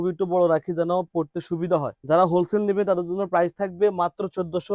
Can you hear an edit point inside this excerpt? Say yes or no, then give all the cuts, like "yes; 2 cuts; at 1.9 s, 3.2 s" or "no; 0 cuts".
yes; 1 cut; at 1.9 s